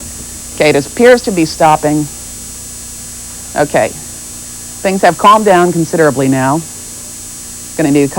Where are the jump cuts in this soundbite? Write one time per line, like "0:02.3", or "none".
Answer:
0:01.5